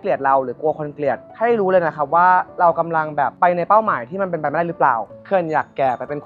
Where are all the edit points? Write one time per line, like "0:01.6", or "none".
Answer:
0:05.1